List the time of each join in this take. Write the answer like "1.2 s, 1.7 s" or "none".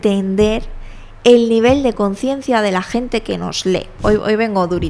3.9 s